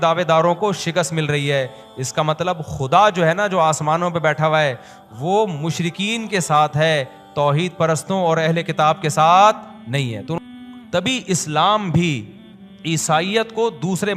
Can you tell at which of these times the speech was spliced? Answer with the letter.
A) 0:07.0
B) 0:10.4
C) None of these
B